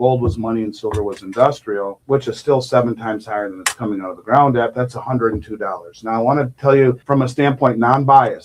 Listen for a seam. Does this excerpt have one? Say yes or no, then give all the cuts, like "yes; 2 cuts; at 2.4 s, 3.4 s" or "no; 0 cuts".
yes; 1 cut; at 7.0 s